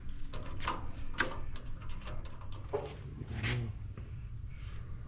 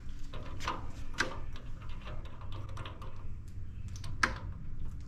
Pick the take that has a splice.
first; 1 cut; at 2.6 s

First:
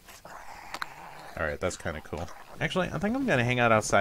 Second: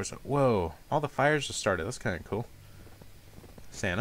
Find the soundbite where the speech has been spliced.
first; 1 cut; at 2.4 s

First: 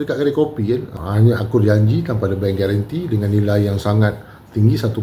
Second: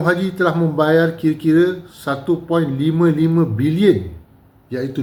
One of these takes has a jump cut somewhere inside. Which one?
first; 1 cut; at 1.0 s

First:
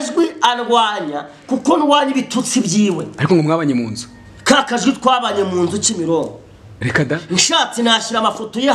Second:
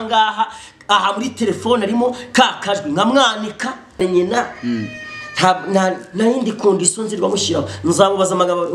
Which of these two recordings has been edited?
second; 1 cut; at 4.0 s

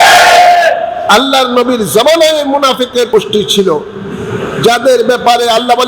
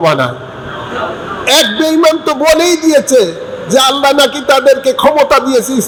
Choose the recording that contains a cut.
first; 2 cuts; at 1.0 s, 3.1 s

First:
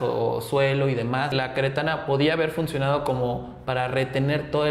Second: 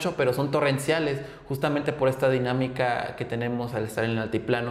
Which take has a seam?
first; 1 cut; at 1.3 s

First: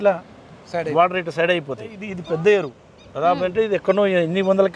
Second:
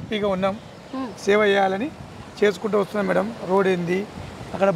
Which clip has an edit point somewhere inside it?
first; 1 cut; at 2.1 s

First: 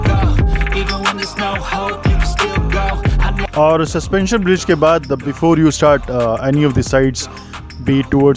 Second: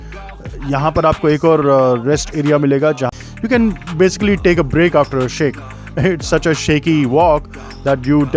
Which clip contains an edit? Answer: second; 1 cut; at 3.1 s

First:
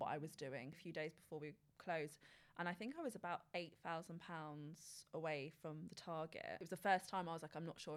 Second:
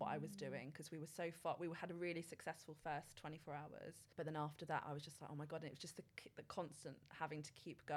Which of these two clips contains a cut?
first; 2 cuts; at 0.8 s, 6.6 s

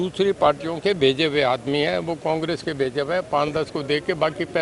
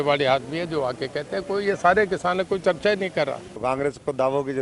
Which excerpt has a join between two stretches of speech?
second; 1 cut; at 3.5 s

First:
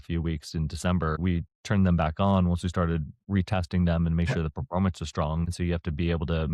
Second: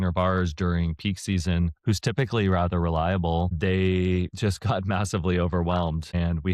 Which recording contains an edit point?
first; 2 cuts; at 1.2 s, 5.5 s

